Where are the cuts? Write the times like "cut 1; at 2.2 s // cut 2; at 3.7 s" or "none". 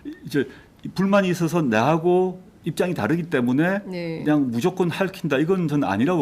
cut 1; at 1.6 s